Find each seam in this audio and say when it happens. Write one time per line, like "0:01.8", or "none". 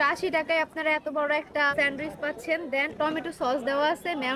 0:01.7
0:02.9